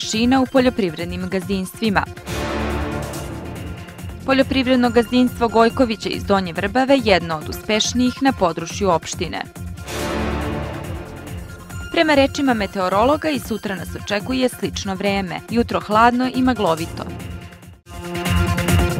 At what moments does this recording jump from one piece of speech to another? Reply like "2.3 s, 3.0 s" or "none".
18.1 s